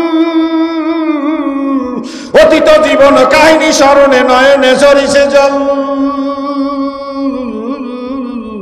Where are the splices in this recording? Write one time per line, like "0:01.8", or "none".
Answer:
none